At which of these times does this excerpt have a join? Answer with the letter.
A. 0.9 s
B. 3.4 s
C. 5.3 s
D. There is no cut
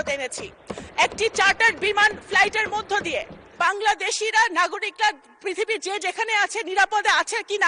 B